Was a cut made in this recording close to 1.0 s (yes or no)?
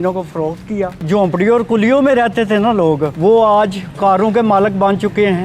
yes